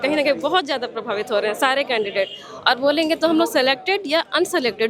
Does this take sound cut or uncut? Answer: uncut